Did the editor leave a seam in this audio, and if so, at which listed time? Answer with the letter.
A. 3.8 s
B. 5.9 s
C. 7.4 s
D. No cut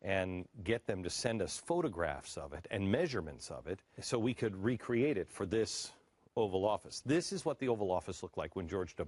D